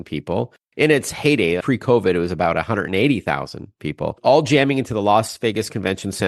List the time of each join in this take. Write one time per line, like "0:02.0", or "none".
0:01.6